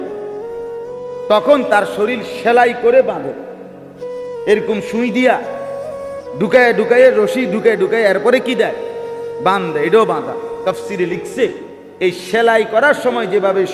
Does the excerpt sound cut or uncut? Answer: uncut